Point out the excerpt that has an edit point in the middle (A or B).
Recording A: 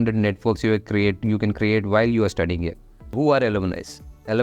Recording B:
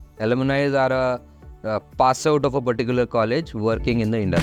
A